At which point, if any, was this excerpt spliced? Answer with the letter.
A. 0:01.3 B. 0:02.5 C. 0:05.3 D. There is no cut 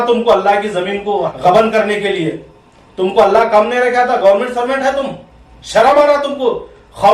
A